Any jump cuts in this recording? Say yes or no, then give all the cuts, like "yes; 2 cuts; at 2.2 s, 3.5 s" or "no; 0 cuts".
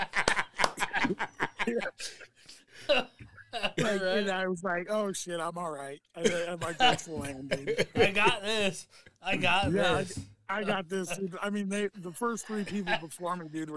no; 0 cuts